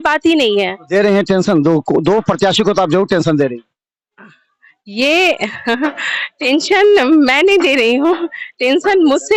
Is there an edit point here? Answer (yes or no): no